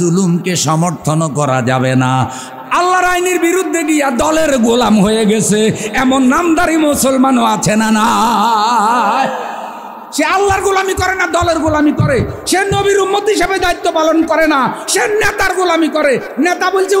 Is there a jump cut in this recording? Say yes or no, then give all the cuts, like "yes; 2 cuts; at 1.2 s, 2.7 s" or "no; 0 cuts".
yes; 1 cut; at 2.5 s